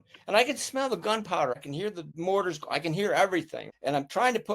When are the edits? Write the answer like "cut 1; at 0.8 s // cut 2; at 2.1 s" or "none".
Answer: cut 1; at 1.7 s // cut 2; at 3.6 s